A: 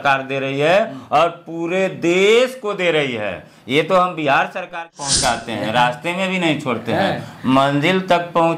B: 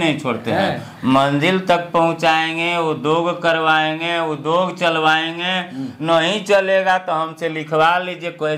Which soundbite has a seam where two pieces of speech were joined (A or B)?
A